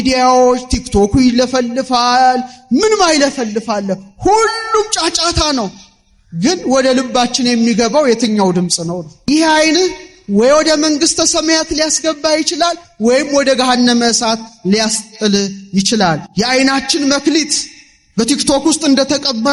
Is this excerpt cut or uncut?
cut